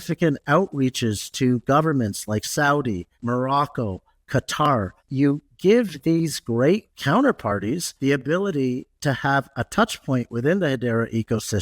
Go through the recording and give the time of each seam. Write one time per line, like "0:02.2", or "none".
0:03.1
0:05.0
0:06.9
0:07.9